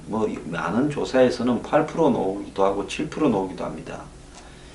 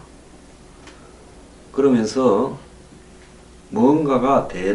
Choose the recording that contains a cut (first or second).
first